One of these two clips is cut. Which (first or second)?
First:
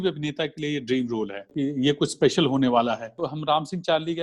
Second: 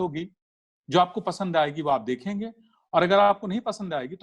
first